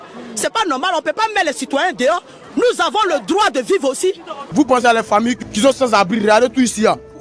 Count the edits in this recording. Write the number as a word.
one